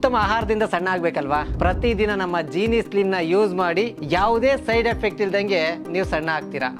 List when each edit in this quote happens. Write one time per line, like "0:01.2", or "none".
none